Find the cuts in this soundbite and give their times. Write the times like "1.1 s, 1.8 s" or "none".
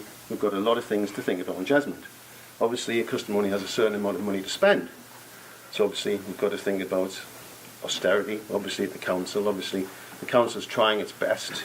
10.7 s